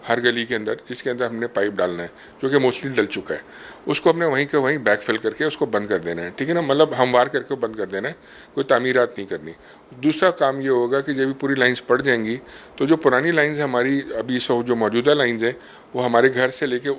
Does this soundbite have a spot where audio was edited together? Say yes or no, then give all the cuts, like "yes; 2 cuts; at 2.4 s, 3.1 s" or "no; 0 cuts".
no; 0 cuts